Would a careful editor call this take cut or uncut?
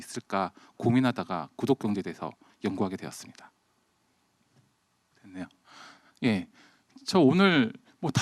cut